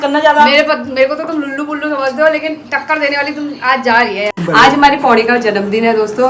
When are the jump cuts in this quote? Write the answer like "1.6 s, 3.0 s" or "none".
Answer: 4.4 s